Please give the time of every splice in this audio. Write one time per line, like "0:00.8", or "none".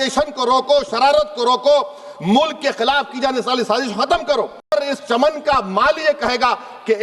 0:04.7

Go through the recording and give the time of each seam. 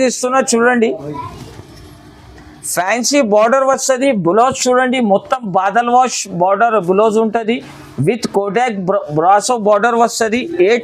none

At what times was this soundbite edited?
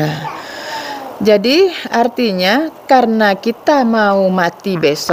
none

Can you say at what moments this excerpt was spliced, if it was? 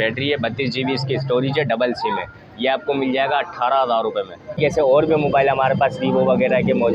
0:04.6

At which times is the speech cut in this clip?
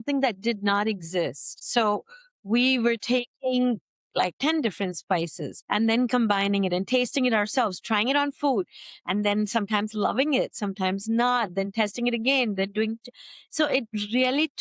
0:04.3

